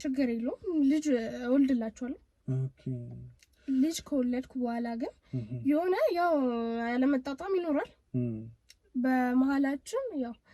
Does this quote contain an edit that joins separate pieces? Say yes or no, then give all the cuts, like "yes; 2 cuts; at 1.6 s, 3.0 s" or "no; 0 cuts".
no; 0 cuts